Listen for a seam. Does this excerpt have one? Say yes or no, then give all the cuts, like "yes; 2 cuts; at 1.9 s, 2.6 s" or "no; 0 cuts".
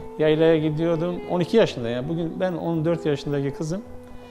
yes; 1 cut; at 1.2 s